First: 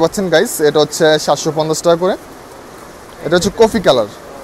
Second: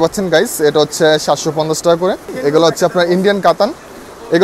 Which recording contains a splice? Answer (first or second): second